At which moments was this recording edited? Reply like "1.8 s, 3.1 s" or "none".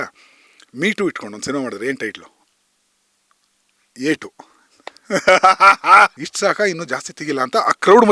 6.2 s